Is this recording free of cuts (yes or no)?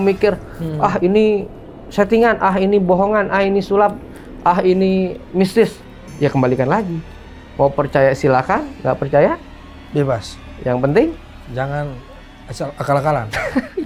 yes